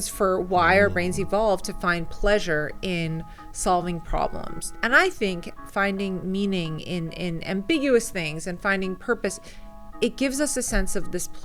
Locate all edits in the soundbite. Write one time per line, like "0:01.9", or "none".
0:04.7